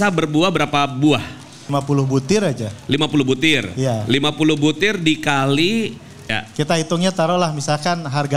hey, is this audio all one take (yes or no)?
no